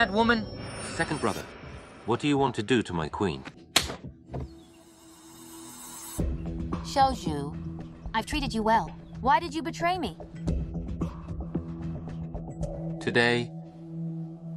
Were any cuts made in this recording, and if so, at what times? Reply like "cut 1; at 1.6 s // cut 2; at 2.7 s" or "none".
cut 1; at 3.6 s